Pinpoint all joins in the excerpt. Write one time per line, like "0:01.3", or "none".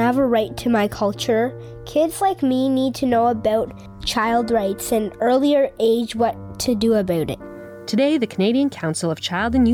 none

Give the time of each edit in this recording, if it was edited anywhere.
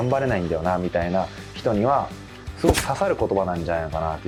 none

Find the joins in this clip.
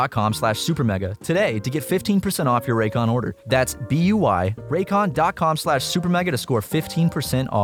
none

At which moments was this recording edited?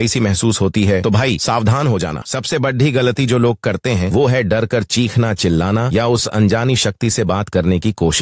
0:02.2

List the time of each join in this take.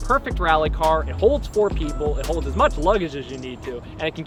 none

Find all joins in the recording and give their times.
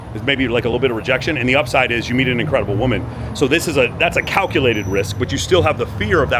none

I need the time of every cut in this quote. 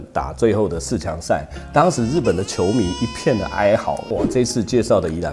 0:04.0

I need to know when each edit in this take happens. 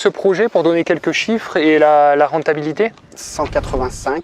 none

